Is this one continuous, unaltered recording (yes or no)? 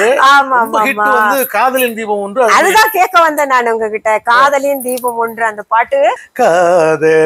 no